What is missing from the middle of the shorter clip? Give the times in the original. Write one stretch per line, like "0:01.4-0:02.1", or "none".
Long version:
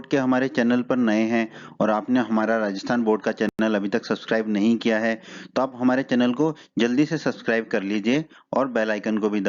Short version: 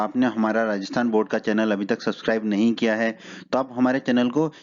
0:03.5-0:03.6